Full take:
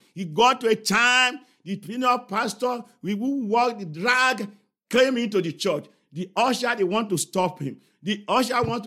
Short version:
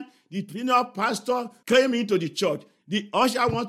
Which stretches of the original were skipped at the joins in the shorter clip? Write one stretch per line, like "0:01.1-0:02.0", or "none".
0:02.9-0:04.8
0:06.0-0:07.9

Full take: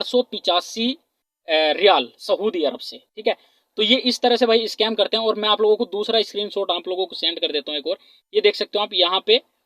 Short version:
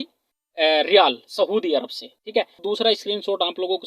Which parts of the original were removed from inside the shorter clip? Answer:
0:03.5-0:05.9

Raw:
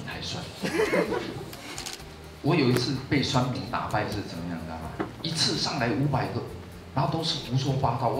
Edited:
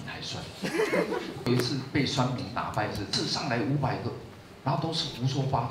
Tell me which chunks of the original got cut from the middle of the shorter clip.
0:01.5-0:02.6
0:04.3-0:05.4

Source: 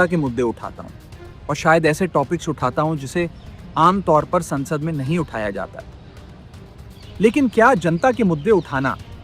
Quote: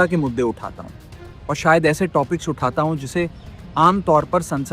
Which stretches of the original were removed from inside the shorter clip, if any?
none

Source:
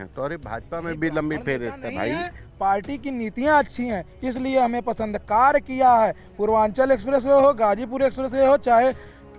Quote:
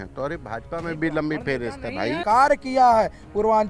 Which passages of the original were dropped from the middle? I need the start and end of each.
0:02.2-0:05.2

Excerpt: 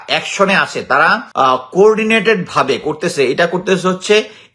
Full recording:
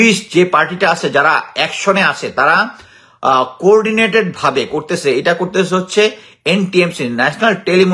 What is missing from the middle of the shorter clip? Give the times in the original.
0:02.7-0:03.1

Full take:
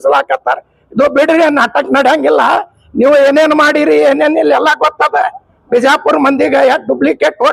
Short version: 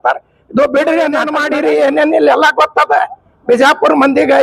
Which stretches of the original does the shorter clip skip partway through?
0:01.8-0:03.6

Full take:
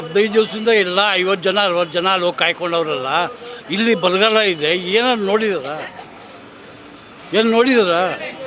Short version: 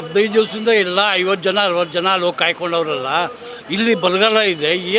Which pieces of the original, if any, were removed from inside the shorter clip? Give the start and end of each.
none

